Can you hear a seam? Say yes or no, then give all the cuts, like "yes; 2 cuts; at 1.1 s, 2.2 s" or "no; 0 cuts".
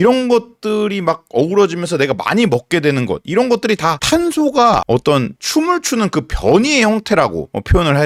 no; 0 cuts